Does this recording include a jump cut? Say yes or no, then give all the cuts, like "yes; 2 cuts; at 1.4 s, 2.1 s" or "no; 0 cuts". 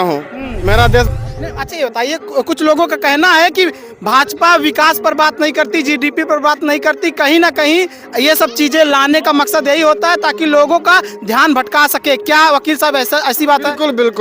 yes; 1 cut; at 1.1 s